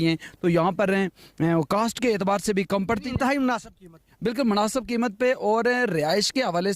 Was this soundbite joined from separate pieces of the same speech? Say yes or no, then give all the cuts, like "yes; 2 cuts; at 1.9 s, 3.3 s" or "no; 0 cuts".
no; 0 cuts